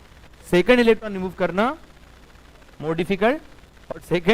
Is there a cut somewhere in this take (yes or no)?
no